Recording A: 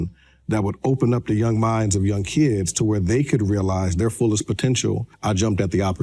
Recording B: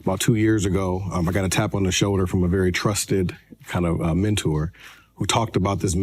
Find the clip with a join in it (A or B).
A